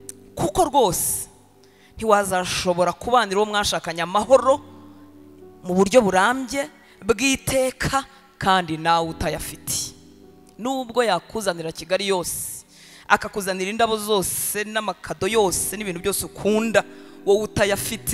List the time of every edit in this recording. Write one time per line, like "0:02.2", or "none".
none